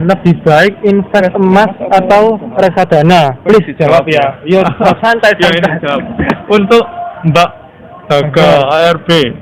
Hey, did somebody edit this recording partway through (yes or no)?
no